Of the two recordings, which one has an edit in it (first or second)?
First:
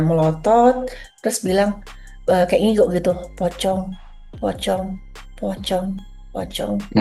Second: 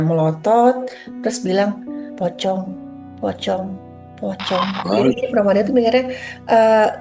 second